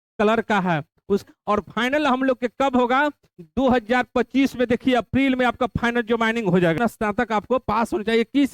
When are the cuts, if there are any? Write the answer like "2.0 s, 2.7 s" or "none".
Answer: 1.2 s, 6.8 s